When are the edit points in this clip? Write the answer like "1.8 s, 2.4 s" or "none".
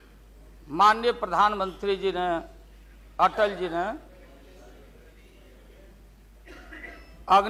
none